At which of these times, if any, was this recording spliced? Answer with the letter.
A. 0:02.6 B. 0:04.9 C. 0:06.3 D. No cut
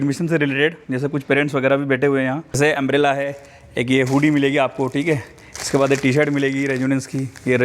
A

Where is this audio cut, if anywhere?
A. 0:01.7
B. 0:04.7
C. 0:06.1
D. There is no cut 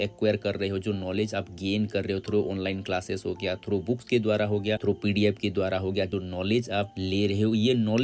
C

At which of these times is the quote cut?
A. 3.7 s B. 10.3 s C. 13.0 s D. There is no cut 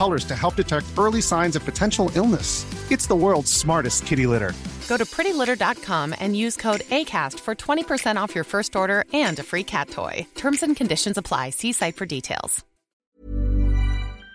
C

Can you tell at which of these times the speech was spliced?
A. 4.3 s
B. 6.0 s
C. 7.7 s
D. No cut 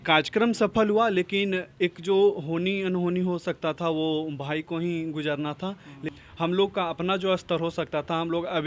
B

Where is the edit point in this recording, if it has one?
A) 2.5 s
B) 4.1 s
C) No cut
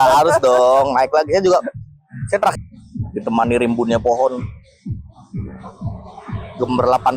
A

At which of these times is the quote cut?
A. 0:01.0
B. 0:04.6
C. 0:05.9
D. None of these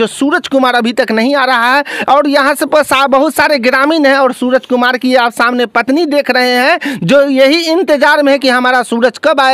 D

